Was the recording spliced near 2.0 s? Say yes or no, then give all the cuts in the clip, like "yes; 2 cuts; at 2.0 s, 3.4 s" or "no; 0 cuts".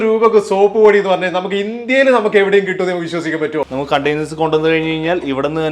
no; 1 cut; at 3.7 s